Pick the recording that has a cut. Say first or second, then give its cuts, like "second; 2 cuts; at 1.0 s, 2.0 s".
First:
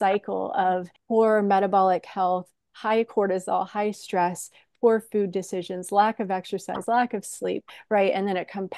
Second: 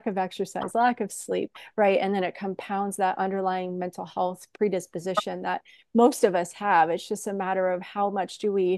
first; 1 cut; at 0.9 s